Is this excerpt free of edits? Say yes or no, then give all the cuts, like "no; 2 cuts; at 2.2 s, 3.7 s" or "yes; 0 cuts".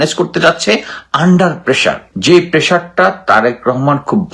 no; 1 cut; at 2.1 s